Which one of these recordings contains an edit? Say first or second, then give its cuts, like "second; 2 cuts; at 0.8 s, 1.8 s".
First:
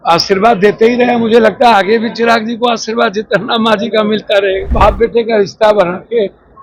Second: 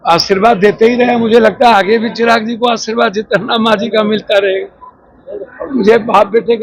first; 1 cut; at 4.7 s